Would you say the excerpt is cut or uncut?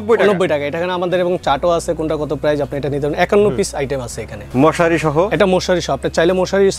cut